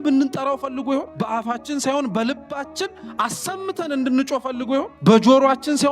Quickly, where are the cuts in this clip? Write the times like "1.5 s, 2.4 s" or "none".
1.1 s, 4.9 s